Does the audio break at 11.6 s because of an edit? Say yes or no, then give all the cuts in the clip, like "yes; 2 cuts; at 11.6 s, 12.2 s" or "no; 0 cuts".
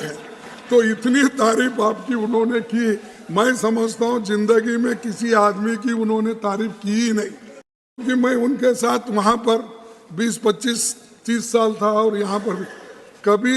no; 1 cut; at 8.0 s